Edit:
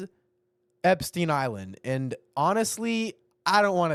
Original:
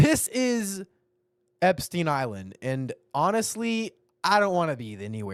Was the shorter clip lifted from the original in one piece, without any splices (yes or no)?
yes